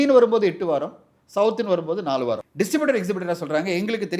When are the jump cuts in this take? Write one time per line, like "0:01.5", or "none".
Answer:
0:02.4